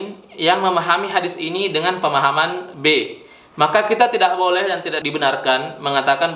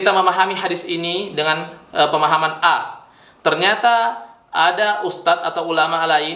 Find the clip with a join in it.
first; 1 cut; at 5.0 s

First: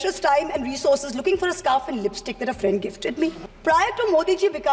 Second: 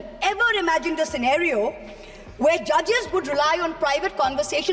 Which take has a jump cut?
first; 1 cut; at 3.5 s

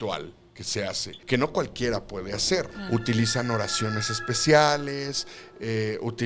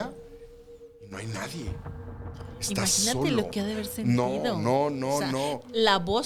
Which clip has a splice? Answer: first; 2 cuts; at 1.1 s, 2.8 s

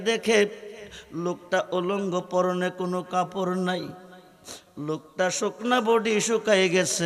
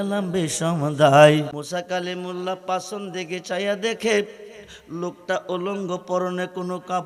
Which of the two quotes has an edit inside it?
second; 1 cut; at 1.6 s

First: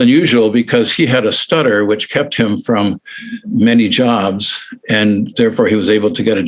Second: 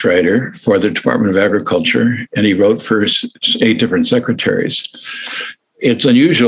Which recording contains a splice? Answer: first; 1 cut; at 3.3 s

